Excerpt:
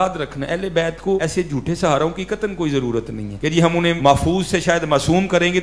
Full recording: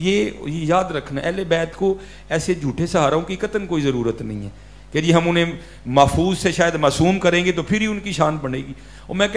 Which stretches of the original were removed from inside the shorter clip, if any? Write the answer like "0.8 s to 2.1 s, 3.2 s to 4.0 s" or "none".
2.0 s to 2.3 s, 4.8 s to 5.6 s